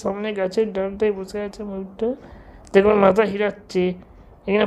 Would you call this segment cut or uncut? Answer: uncut